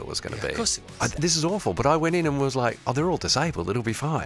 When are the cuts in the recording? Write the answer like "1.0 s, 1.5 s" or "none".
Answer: 1.1 s